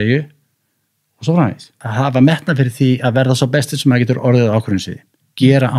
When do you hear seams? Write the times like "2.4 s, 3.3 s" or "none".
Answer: 1.8 s